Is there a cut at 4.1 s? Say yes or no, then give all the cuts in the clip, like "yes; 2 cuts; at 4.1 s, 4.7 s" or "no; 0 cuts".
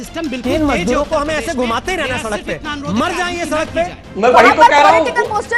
yes; 1 cut; at 4.1 s